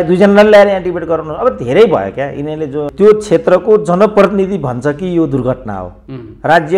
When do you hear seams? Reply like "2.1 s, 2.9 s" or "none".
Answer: 2.9 s